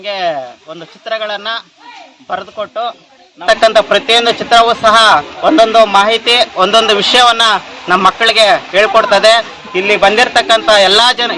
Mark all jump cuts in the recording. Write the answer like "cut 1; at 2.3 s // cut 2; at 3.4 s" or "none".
cut 1; at 3.4 s